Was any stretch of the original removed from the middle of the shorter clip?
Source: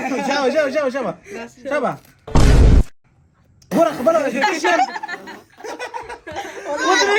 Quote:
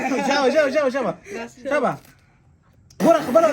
yes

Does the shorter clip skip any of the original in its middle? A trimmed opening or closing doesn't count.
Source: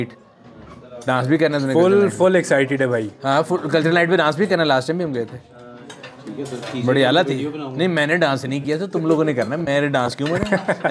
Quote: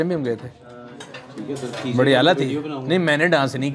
no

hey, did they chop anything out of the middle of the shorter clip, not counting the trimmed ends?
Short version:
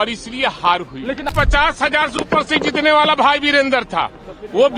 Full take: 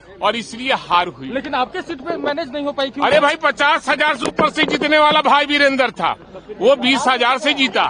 yes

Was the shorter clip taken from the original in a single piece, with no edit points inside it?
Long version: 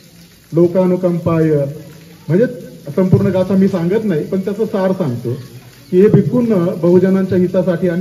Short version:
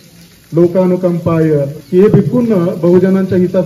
no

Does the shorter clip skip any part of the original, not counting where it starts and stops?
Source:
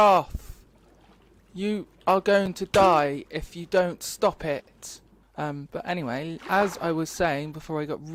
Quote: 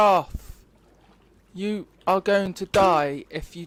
no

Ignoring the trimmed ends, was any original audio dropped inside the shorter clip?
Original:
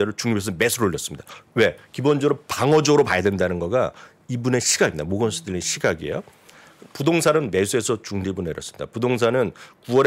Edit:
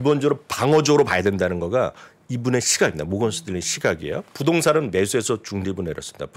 yes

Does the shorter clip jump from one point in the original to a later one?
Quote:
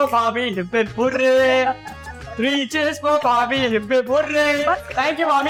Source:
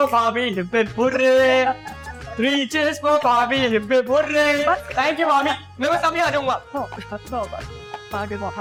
no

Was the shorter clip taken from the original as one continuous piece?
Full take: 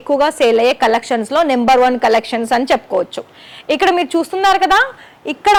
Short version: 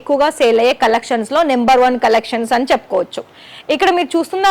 yes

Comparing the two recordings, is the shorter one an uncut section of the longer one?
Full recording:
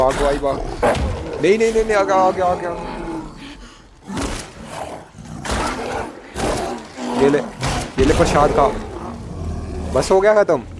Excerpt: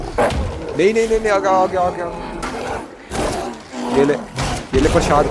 no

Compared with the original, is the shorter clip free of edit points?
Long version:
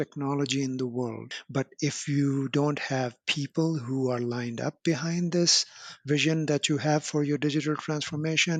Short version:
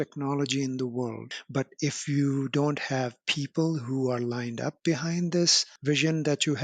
no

